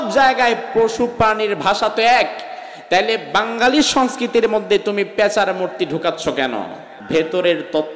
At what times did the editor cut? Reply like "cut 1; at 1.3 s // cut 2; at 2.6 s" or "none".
cut 1; at 6.9 s